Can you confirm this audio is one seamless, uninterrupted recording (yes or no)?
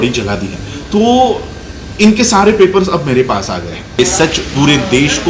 no